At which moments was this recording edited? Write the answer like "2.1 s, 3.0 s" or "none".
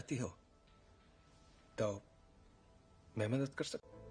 none